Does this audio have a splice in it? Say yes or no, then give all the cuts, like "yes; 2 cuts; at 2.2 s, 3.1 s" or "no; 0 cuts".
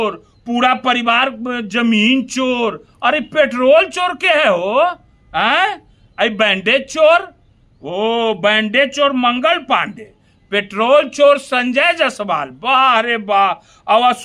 no; 0 cuts